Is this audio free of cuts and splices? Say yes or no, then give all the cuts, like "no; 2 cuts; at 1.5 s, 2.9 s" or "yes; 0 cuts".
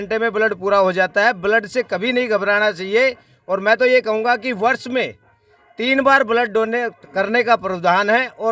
yes; 0 cuts